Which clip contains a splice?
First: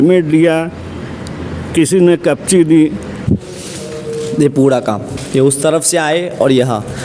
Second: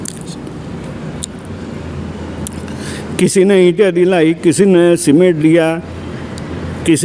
first; 1 cut; at 3.1 s

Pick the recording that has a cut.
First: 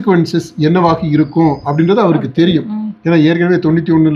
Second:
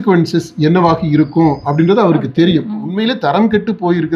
second; 1 cut; at 2.9 s

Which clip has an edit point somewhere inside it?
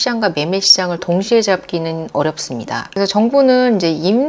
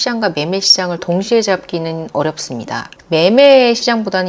second; 1 cut; at 2.9 s

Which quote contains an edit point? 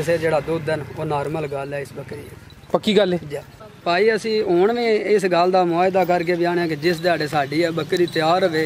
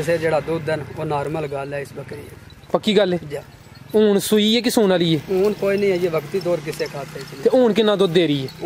first; 1 cut; at 3.7 s

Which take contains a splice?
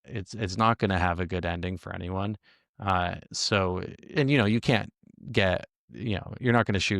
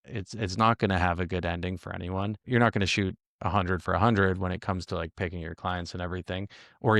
second; 1 cut; at 2.4 s

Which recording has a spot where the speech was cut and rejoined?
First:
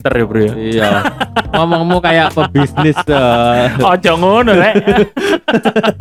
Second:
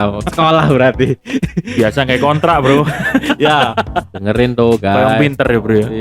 second; 1 cut; at 4.1 s

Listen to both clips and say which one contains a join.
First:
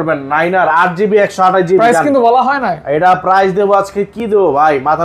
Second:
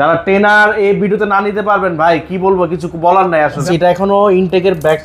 second; 1 cut; at 3.6 s

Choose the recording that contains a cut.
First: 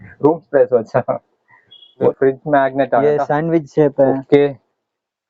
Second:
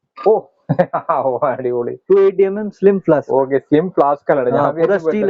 first; 1 cut; at 2.1 s

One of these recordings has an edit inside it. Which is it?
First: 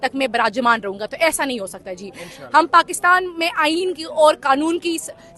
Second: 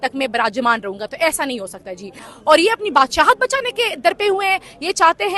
second; 1 cut; at 2.3 s

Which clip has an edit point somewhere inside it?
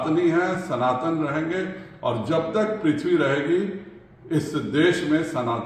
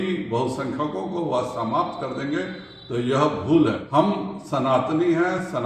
second; 1 cut; at 3.8 s

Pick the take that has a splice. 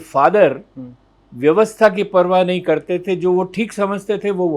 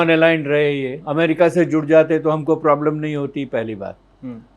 second; 1 cut; at 1.0 s

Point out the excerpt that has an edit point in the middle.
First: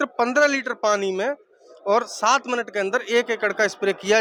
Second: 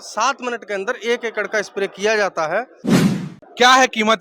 second; 1 cut; at 3.1 s

